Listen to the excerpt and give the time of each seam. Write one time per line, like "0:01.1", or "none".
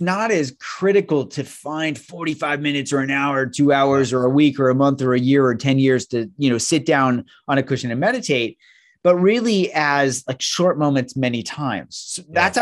none